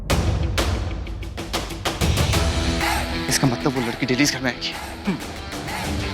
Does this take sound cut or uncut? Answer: uncut